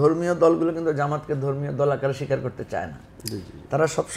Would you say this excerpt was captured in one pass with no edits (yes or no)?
yes